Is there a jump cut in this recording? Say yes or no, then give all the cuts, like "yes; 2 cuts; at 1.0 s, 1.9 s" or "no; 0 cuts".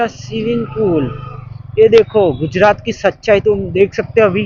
no; 0 cuts